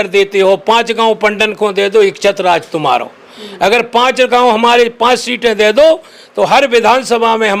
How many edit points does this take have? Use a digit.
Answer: 0